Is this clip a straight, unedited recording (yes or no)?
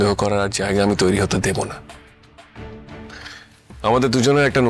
yes